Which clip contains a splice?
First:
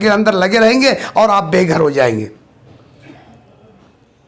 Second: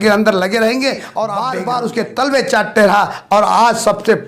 second; 1 cut; at 1.4 s

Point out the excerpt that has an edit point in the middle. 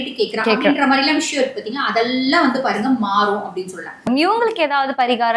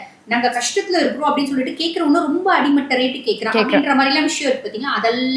first; 1 cut; at 4.0 s

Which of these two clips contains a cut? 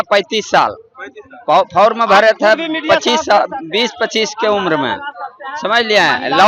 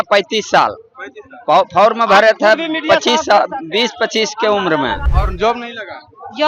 second; 1 cut; at 5.1 s

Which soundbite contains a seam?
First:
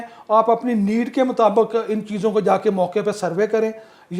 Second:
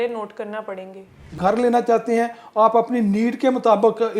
second; 1 cut; at 1.4 s

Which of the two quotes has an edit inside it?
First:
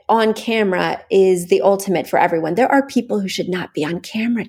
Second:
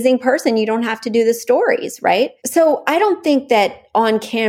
second; 1 cut; at 2.3 s

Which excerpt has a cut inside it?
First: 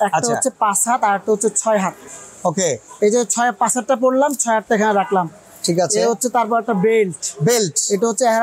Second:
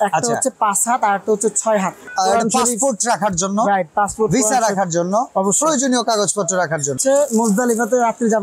second; 2 cuts; at 2.0 s, 7.0 s

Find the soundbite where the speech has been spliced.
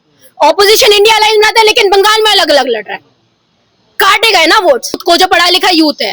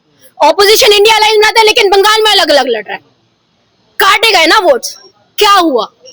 first; 1 cut; at 5.0 s

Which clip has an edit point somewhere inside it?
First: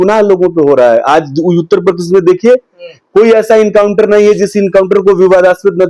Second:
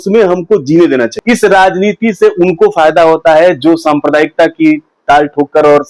second; 1 cut; at 1.1 s

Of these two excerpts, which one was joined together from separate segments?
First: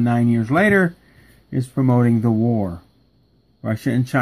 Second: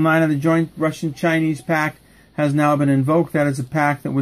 first; 1 cut; at 1.2 s

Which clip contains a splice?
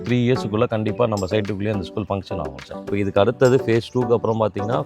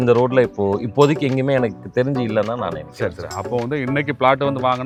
first; 1 cut; at 2.9 s

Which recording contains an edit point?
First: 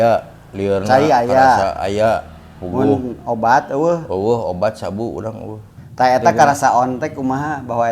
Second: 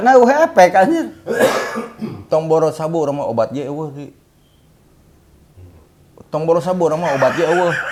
first; 1 cut; at 5.8 s

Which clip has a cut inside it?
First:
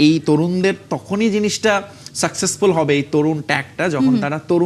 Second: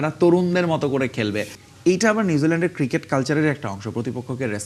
second; 1 cut; at 1.5 s

